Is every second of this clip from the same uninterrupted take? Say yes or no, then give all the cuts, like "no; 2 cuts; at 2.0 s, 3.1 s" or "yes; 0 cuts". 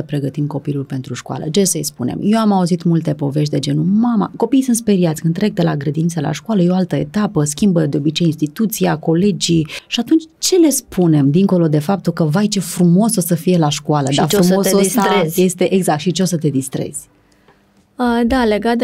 yes; 0 cuts